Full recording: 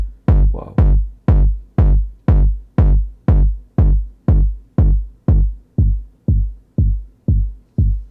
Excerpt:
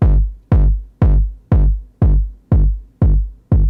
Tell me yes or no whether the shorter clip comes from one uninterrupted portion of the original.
yes